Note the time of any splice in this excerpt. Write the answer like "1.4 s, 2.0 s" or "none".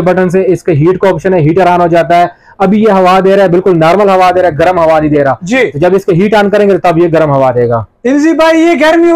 none

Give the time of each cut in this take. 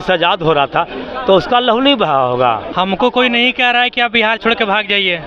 2.7 s

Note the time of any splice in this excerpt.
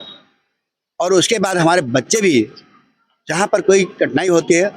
none

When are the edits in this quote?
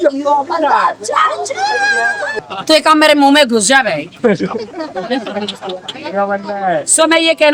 2.4 s

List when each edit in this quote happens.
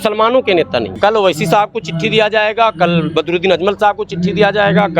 0.9 s

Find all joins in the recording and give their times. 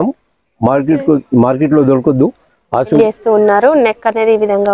3.0 s

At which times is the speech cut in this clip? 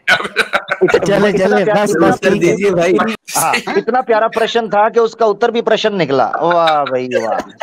3.2 s

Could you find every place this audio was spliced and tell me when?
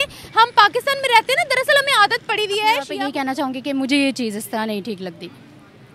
2.9 s

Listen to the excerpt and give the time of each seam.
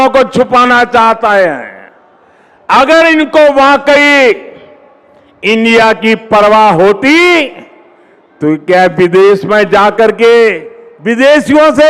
none

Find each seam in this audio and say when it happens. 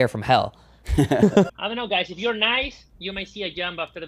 1.5 s

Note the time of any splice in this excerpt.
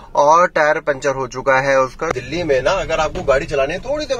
2.1 s

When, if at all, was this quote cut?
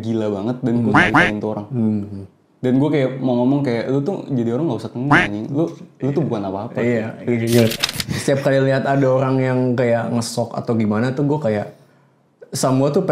7.8 s

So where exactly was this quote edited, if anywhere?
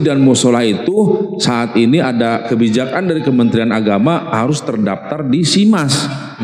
none

